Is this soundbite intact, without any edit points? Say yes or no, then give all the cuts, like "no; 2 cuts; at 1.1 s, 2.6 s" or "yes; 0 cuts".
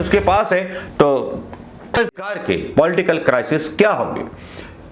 no; 1 cut; at 2.0 s